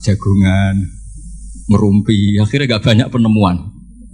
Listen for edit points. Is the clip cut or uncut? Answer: uncut